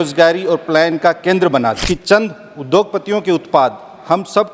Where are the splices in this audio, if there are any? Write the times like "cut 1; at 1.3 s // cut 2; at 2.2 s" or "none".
cut 1; at 1.8 s